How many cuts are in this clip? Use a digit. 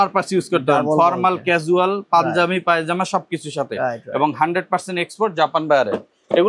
0